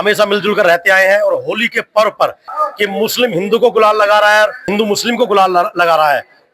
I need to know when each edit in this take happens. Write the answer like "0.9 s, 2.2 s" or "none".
2.5 s, 4.6 s